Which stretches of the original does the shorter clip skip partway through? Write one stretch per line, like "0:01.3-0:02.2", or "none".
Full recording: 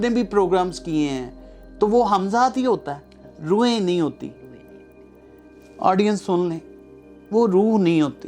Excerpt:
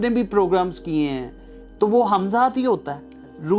none